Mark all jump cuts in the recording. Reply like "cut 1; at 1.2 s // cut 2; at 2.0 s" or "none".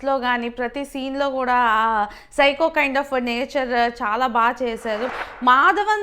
cut 1; at 5.1 s